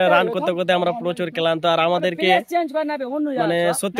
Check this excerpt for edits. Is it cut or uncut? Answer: uncut